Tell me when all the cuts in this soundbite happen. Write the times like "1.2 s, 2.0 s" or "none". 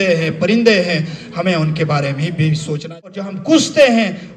3.0 s